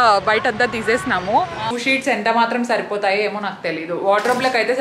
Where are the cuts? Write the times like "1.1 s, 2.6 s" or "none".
1.7 s

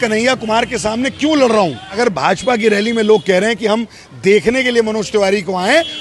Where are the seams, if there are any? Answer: 1.9 s

